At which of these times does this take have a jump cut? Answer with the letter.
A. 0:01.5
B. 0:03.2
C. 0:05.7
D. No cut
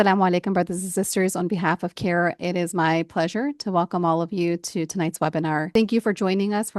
C